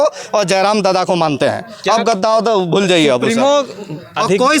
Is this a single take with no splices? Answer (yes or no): yes